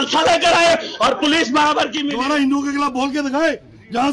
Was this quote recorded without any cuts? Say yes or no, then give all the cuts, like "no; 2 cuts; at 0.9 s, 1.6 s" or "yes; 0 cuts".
no; 1 cut; at 2.0 s